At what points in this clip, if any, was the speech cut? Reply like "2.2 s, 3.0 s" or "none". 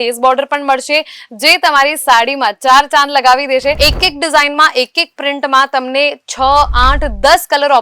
3.8 s